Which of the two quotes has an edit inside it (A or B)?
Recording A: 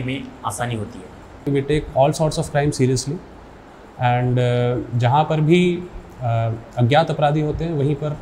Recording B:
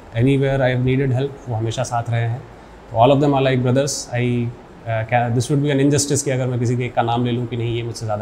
A